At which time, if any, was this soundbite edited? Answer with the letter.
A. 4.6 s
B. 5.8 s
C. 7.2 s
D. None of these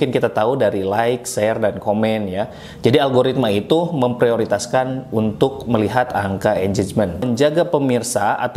C